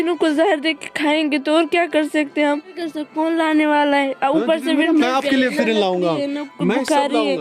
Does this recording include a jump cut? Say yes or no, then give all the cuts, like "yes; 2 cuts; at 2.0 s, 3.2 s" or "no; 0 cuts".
yes; 1 cut; at 2.8 s